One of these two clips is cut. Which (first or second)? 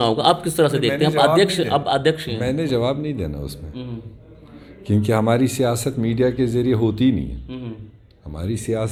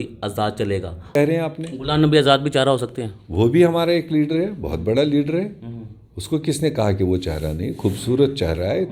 second